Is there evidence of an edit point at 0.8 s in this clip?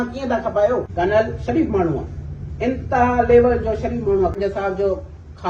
yes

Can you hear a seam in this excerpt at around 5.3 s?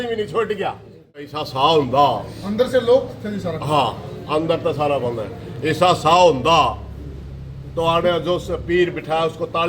no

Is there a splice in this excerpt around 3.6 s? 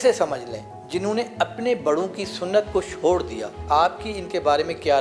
yes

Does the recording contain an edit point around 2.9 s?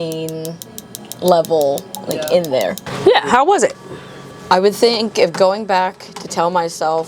yes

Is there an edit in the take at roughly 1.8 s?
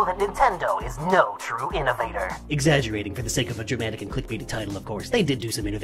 yes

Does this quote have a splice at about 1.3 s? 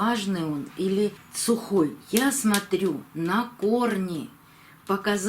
yes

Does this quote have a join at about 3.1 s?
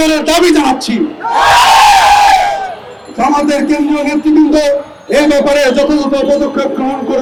no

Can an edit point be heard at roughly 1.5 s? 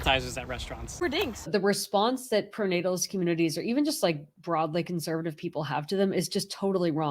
yes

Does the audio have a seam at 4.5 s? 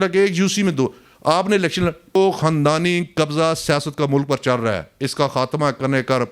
no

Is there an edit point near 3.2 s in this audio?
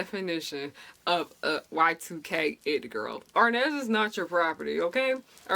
yes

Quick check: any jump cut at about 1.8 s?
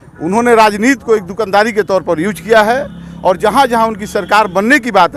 no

